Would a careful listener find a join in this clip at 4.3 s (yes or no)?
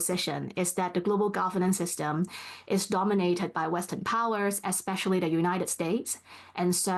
no